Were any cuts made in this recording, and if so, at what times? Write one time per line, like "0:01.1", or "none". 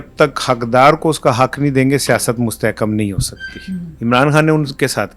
0:03.9